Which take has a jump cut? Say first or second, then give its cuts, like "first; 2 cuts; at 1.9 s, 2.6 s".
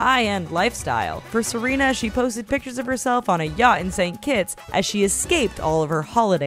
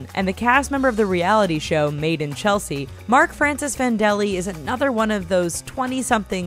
second; 1 cut; at 1.3 s